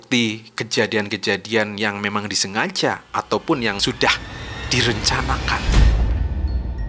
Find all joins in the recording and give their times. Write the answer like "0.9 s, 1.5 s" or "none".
5.6 s